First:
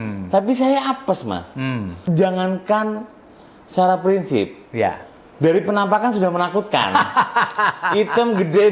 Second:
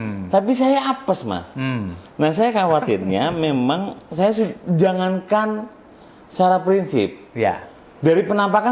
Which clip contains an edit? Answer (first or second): first